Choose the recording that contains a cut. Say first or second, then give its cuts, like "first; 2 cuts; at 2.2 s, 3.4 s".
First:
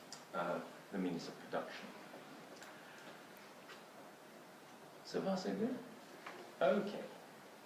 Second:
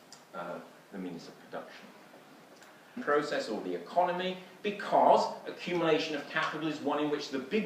first; 1 cut; at 3.0 s